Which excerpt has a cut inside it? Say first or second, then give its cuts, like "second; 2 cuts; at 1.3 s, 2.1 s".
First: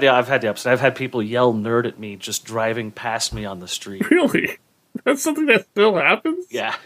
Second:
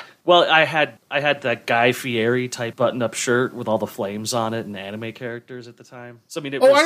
second; 2 cuts; at 1.0 s, 2.6 s